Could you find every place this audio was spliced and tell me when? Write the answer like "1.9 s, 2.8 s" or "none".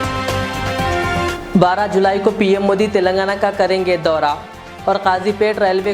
1.2 s